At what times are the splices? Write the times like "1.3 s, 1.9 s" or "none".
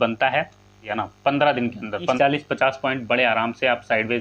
0.9 s, 2.2 s

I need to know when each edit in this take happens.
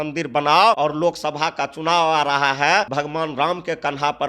0.8 s, 2.9 s

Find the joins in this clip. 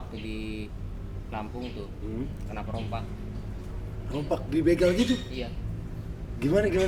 none

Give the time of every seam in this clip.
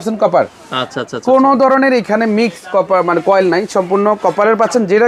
none

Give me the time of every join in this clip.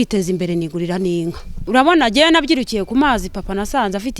1.5 s

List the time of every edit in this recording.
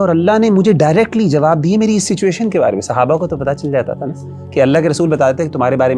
none

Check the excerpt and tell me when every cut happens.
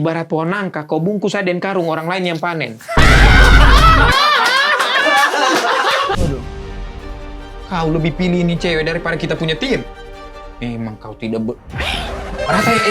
6.2 s

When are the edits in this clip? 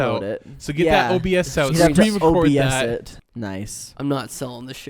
3.2 s

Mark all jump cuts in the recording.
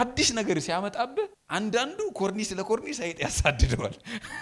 1.4 s

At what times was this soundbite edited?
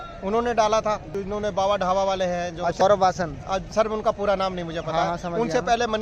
1.1 s, 2.8 s

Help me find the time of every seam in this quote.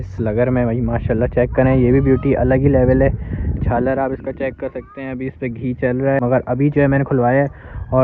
6.2 s

